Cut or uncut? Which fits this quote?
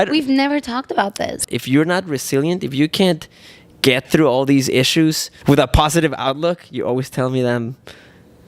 cut